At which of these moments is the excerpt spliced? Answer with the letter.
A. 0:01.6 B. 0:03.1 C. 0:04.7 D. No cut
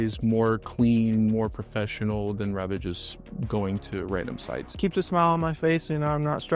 C